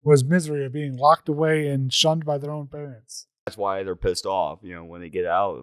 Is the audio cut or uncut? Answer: cut